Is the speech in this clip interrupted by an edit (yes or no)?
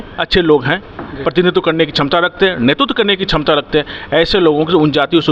no